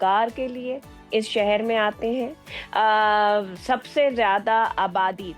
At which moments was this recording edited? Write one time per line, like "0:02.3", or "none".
none

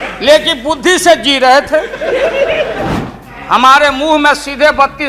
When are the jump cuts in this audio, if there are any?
0:03.0

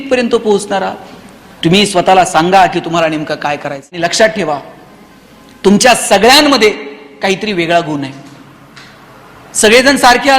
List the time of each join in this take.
0:04.0

